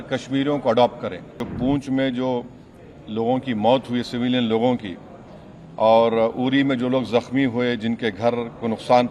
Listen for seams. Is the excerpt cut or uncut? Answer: cut